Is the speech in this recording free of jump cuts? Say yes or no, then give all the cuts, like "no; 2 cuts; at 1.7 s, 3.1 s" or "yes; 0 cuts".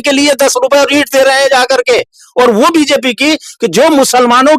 yes; 0 cuts